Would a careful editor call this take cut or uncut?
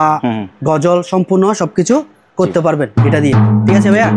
uncut